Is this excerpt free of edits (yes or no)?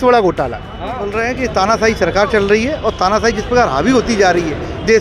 no